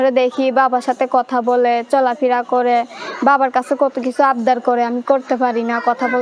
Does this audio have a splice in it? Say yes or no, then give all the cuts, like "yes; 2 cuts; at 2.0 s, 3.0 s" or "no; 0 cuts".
no; 0 cuts